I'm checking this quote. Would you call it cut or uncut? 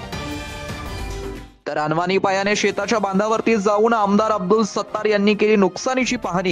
cut